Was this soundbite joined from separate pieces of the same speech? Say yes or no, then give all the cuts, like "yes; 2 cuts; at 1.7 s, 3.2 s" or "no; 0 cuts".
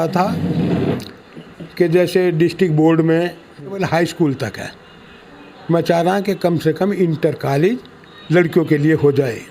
yes; 1 cut; at 3.8 s